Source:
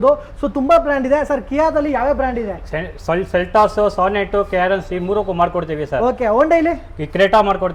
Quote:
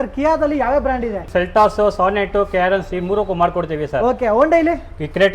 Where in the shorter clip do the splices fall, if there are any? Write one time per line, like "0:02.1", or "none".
0:01.3